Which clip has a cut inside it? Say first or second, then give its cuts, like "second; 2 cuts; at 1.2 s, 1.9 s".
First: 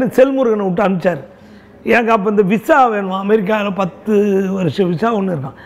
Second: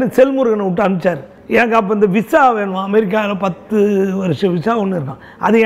second; 1 cut; at 1.3 s